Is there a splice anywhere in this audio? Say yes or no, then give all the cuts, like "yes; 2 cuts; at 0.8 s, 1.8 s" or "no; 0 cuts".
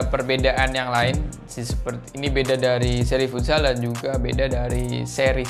no; 0 cuts